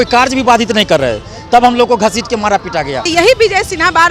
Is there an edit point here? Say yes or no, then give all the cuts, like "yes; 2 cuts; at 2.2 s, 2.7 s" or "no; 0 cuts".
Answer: yes; 1 cut; at 3.1 s